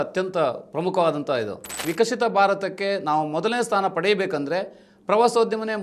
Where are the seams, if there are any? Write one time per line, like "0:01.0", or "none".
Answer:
0:01.9

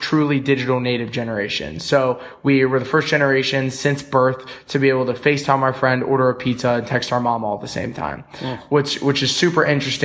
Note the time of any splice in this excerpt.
none

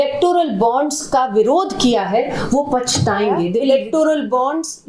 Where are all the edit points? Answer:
0:03.6

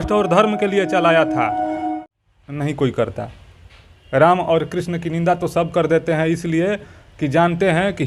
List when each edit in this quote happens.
0:02.0

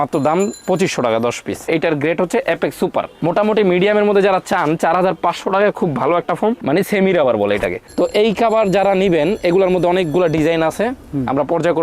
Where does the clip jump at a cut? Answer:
0:01.7
0:07.9

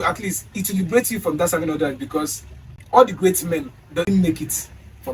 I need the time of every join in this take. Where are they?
0:02.7
0:04.1

